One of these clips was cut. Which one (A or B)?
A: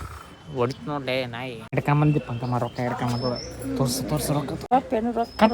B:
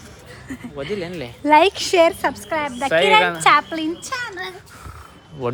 A